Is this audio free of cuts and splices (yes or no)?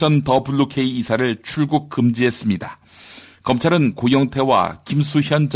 no